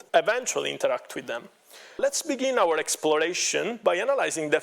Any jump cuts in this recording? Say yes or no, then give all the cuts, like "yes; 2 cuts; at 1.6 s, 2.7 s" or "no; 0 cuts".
yes; 1 cut; at 2.0 s